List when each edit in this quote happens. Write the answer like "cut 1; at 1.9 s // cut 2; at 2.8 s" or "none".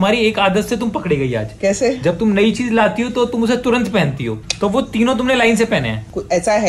cut 1; at 4.4 s